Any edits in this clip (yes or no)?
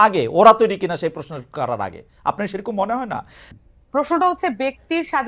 yes